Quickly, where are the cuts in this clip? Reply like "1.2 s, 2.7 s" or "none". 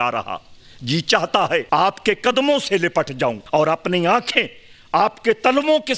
1.6 s, 3.4 s